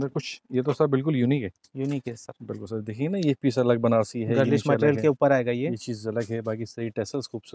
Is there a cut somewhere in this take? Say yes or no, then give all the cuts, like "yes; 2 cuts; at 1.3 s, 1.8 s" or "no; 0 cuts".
no; 0 cuts